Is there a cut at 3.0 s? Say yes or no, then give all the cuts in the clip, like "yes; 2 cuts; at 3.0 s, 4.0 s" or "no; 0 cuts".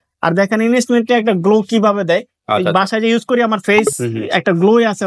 no; 0 cuts